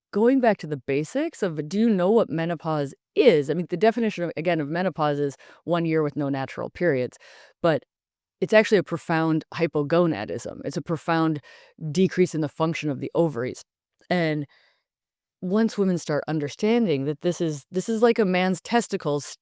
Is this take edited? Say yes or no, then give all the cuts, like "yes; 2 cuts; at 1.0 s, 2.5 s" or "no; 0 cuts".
no; 0 cuts